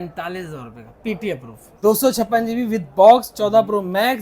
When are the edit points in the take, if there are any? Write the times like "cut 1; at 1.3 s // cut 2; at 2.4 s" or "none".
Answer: cut 1; at 1.6 s